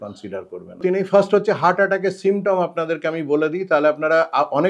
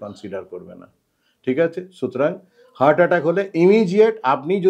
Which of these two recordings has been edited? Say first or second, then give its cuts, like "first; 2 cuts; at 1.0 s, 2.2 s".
first; 1 cut; at 0.9 s